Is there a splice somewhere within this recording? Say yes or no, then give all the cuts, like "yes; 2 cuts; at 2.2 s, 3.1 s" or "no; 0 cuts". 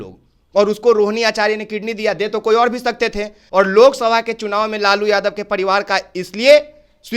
yes; 1 cut; at 3.3 s